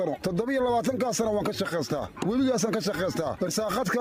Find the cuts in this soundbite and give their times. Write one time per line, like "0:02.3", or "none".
none